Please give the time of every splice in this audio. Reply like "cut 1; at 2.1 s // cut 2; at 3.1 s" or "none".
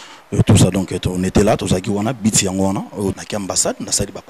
cut 1; at 3.1 s